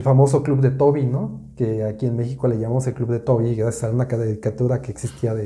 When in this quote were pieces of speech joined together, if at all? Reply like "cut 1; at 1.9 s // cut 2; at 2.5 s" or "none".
none